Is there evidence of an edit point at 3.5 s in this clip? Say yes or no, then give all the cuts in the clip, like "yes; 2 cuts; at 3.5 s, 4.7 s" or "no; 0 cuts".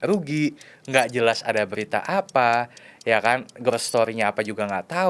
no; 0 cuts